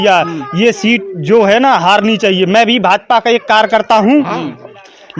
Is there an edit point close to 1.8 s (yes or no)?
no